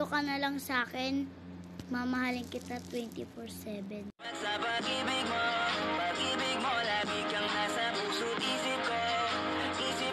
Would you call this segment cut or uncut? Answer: uncut